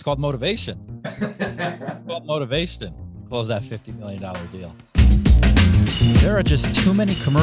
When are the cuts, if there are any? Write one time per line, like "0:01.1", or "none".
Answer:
0:05.0